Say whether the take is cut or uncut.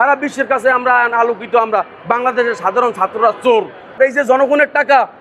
cut